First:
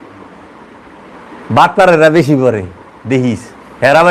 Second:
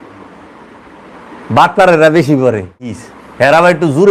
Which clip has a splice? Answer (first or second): second